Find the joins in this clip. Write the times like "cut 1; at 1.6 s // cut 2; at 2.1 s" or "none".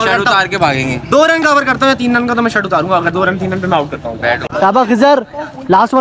cut 1; at 4.5 s